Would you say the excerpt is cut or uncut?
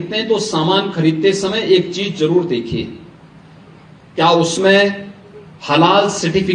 uncut